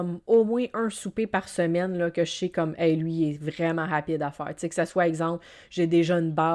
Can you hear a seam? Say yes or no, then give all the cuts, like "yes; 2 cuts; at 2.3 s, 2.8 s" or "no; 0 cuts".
no; 0 cuts